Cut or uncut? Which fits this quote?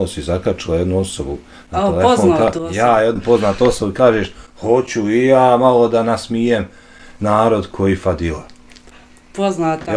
uncut